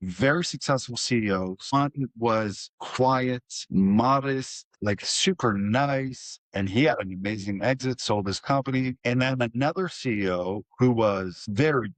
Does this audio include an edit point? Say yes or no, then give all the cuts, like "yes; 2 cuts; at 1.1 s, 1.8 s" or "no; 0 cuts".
no; 0 cuts